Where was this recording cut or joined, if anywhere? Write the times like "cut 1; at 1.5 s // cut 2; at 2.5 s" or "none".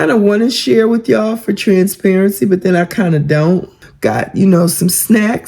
cut 1; at 3.8 s